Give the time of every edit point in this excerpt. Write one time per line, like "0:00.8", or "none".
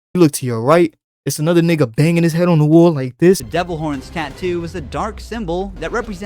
0:03.5